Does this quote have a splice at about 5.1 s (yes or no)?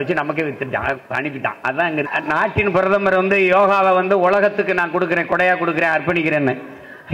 no